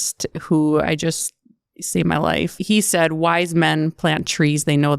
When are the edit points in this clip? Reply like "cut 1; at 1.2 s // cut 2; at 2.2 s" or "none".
cut 1; at 2.6 s